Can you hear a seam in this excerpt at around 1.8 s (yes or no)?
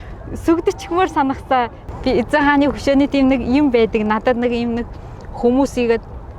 yes